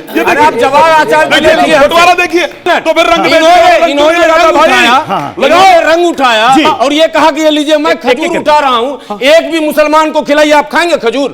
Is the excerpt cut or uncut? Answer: cut